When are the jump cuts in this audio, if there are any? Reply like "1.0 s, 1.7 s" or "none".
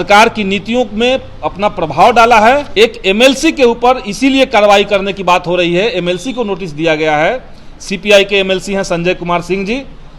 2.7 s